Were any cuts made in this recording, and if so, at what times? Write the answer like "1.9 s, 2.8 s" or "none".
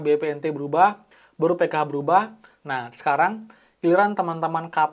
2.5 s